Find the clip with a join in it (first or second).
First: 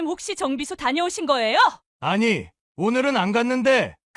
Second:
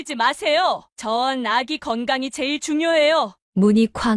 first